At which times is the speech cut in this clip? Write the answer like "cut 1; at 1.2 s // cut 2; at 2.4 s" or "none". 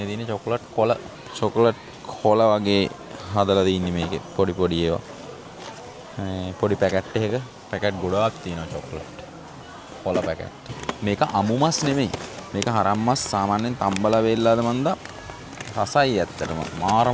cut 1; at 1.2 s // cut 2; at 10.6 s